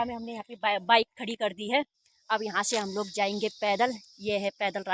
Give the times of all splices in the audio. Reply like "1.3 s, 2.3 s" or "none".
none

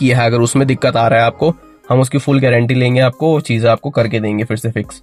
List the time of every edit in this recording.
none

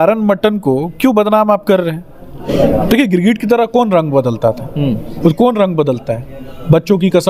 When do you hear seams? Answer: 2.4 s

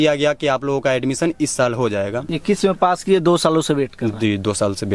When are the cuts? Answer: 2.3 s

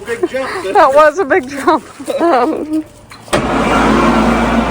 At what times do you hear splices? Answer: 3.3 s

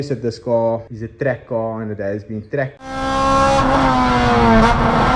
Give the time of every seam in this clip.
1.0 s, 2.8 s

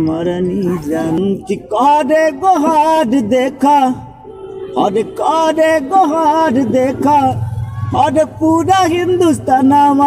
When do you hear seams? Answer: 1.2 s

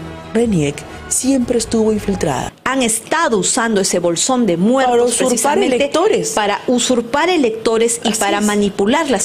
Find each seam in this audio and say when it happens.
2.5 s

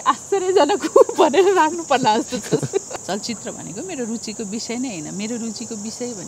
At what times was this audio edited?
2.9 s

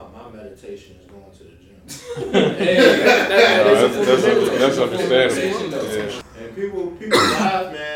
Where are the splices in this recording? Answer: 6.2 s

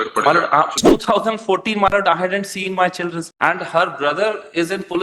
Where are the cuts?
0.9 s

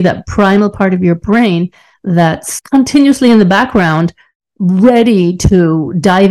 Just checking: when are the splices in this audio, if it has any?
2.5 s

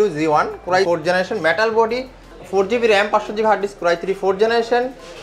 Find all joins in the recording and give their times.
0.9 s, 2.3 s

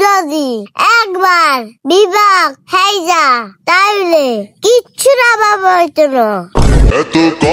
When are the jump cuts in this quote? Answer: none

